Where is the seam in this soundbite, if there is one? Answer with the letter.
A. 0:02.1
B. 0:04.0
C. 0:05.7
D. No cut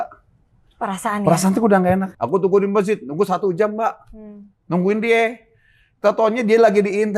A